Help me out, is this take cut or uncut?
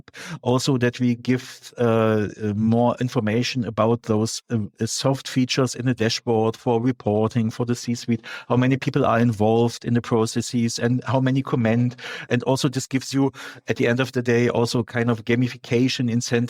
uncut